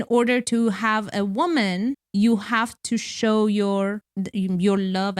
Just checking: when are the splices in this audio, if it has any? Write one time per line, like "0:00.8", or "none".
0:02.0
0:04.0